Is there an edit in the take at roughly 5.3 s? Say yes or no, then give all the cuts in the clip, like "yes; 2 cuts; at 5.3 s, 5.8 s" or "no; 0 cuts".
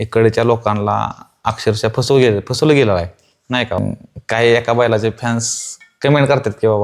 no; 1 cut; at 3.8 s